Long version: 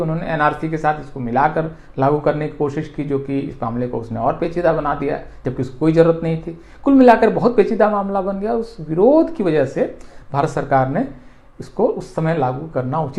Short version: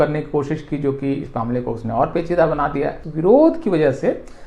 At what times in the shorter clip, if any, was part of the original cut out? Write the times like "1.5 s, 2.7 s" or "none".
3.0 s